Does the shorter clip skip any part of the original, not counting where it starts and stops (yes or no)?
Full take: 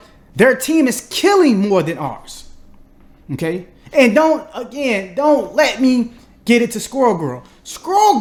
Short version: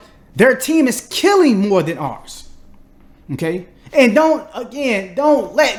no